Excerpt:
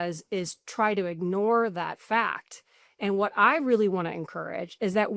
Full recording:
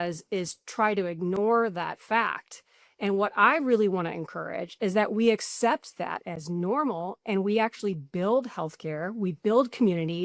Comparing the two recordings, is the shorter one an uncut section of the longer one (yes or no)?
yes